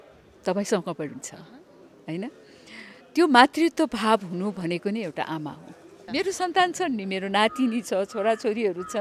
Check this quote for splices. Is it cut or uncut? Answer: cut